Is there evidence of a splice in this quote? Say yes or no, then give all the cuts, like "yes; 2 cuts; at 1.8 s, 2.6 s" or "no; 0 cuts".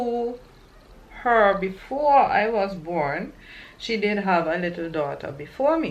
no; 0 cuts